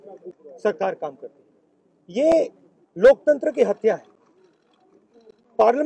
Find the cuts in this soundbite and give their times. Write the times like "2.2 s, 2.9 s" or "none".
none

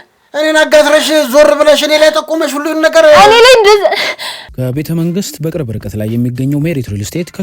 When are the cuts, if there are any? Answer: 4.5 s

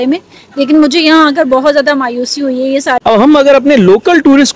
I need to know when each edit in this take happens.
3.0 s

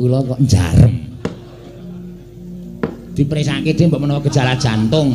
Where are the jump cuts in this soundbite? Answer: 4.0 s

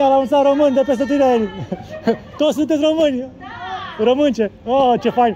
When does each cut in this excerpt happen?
none

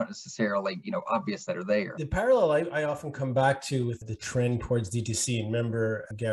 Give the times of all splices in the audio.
1.9 s, 4.1 s

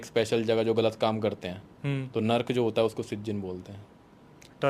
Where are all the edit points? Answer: none

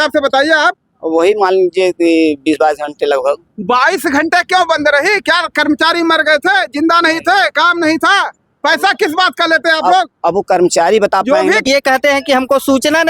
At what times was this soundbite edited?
11.6 s

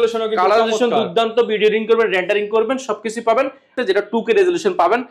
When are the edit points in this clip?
3.7 s

